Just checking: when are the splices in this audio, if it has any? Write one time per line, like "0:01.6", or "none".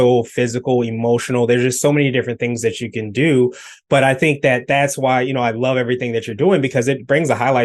none